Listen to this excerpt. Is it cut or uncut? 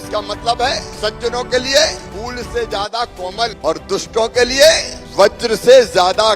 cut